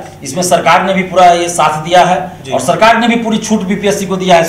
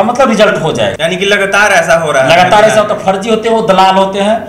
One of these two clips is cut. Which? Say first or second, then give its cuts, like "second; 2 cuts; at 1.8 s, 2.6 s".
second; 1 cut; at 1.0 s